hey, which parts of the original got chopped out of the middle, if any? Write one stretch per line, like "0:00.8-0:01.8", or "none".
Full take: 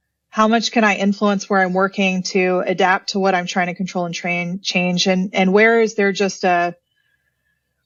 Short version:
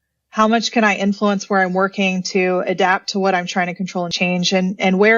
0:04.1-0:04.7